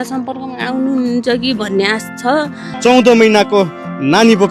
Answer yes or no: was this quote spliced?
yes